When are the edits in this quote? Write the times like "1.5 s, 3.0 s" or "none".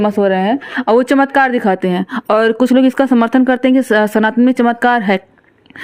none